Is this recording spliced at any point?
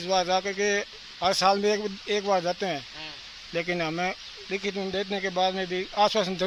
no; 0 cuts

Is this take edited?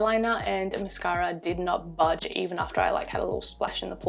no; 0 cuts

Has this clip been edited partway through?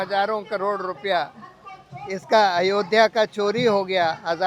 no; 0 cuts

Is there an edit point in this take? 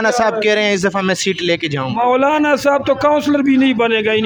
no; 0 cuts

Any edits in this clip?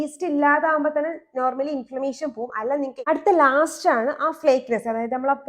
yes; 1 cut; at 3.0 s

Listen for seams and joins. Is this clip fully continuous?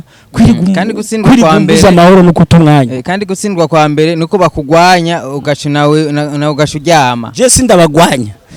yes; 0 cuts

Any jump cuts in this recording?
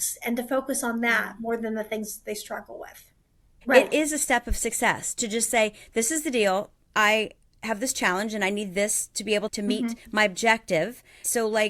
yes; 1 cut; at 3.5 s

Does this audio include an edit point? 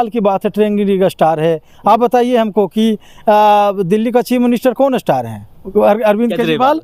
no; 0 cuts

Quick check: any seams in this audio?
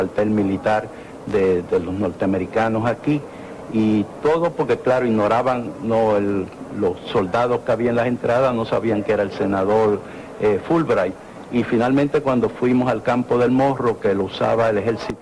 yes; 1 cut; at 7.4 s

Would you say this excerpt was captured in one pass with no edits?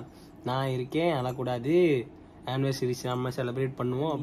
yes; 0 cuts

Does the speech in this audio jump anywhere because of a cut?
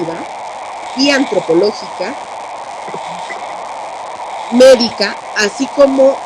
no; 0 cuts

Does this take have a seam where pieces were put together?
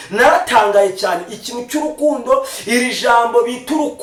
no; 0 cuts

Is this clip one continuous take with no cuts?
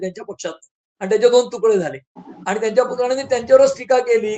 yes; 0 cuts

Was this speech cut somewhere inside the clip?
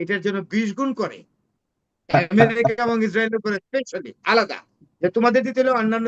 no; 0 cuts

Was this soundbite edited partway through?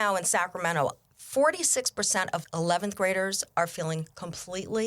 yes; 1 cut; at 2.4 s

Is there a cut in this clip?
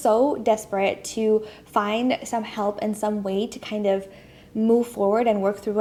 no; 0 cuts

